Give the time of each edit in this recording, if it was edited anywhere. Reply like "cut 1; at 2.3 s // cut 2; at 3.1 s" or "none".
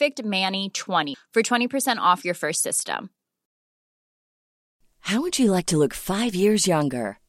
none